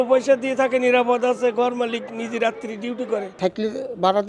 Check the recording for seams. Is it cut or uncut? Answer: cut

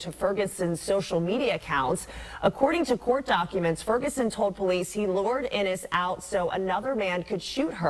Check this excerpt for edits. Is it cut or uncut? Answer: cut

